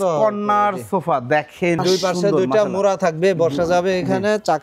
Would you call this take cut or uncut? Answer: cut